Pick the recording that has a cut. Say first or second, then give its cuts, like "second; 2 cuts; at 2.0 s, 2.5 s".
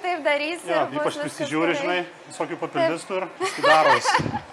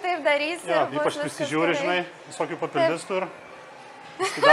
first; 1 cut; at 3.3 s